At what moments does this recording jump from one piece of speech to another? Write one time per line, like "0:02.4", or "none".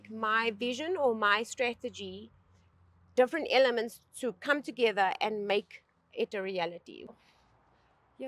0:06.9